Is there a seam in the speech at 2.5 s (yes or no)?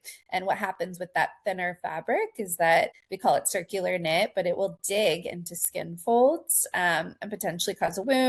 no